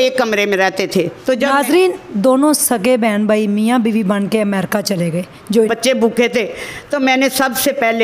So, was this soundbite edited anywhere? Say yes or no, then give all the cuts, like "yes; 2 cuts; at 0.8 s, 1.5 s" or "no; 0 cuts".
yes; 1 cut; at 5.7 s